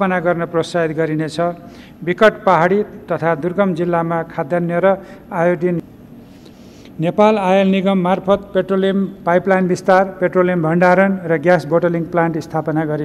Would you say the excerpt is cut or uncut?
cut